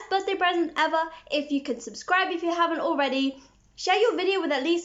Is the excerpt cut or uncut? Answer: uncut